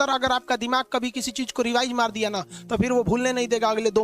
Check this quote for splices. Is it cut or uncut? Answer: uncut